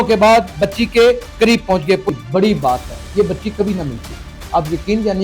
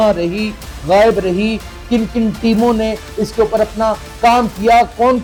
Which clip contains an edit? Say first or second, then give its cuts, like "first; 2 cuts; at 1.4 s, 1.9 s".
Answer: first; 1 cut; at 2.1 s